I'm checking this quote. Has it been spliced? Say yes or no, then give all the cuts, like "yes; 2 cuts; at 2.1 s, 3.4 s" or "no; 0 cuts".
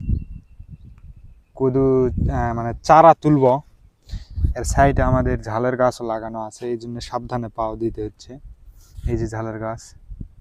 no; 0 cuts